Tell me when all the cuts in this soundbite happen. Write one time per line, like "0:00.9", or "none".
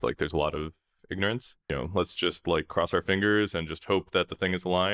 0:01.5